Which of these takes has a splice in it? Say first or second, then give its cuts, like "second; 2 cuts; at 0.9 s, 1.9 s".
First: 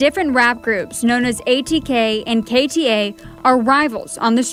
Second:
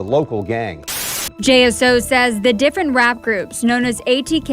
second; 1 cut; at 0.9 s